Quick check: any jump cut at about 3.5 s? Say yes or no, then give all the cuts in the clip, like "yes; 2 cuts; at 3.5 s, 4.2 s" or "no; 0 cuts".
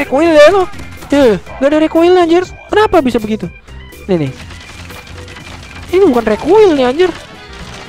no; 0 cuts